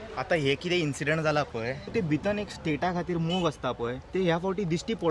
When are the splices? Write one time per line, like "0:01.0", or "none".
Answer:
0:01.9
0:04.0